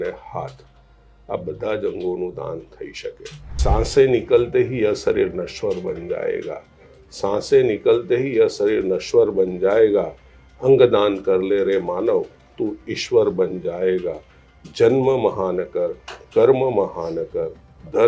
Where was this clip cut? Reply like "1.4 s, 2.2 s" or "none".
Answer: 3.6 s